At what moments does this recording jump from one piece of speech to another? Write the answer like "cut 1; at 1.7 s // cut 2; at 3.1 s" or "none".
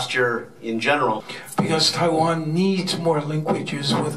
cut 1; at 1.4 s